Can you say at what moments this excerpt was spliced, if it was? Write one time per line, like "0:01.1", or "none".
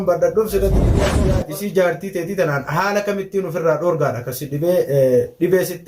0:01.0